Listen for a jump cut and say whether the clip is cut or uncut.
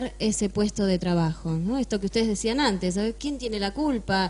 uncut